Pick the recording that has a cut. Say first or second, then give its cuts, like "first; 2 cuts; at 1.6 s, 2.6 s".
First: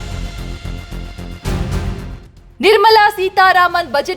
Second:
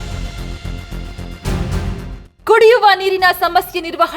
second; 1 cut; at 2.3 s